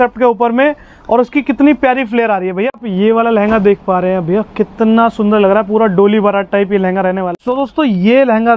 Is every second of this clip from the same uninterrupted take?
no; 2 cuts; at 2.6 s, 7.3 s

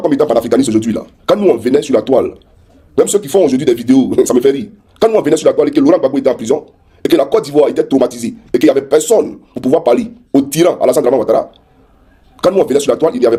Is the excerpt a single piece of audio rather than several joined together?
yes; 0 cuts

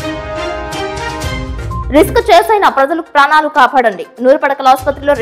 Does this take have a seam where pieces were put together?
yes; 1 cut; at 1.9 s

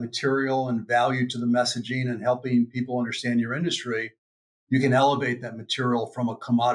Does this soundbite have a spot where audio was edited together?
no; 0 cuts

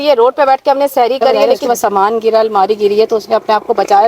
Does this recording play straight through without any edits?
no; 1 cut; at 1.6 s

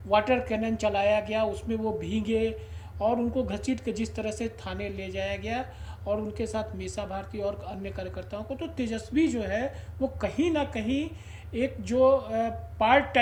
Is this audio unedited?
yes; 0 cuts

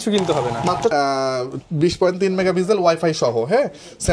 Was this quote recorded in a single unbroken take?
no; 1 cut; at 0.9 s

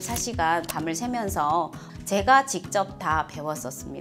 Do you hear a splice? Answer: yes; 1 cut; at 1.8 s

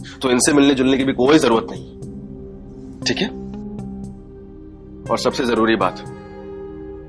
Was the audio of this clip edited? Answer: no; 0 cuts

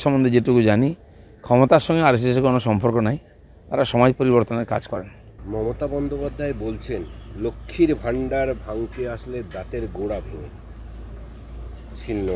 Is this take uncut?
no; 1 cut; at 5.2 s

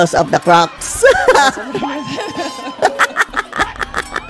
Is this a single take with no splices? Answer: yes; 0 cuts

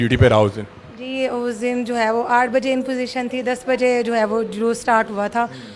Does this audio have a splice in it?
no; 0 cuts

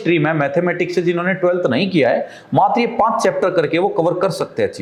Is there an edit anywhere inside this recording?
no; 0 cuts

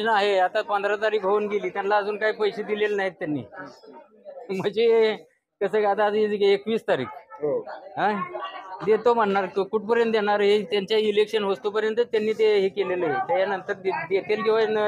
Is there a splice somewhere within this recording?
no; 0 cuts

